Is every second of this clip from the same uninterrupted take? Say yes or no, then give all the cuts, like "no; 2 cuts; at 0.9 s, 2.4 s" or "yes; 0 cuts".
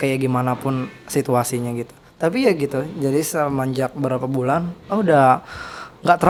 yes; 0 cuts